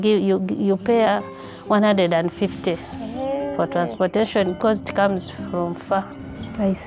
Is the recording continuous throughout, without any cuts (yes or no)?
yes